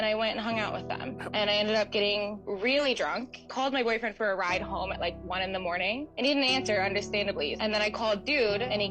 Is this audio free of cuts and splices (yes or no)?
no